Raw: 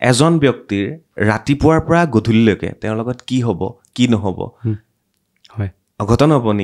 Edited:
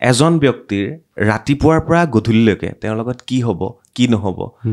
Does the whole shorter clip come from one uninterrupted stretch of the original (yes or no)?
yes